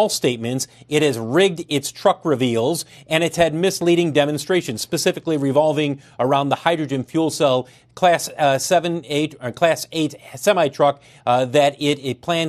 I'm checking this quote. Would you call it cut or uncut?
uncut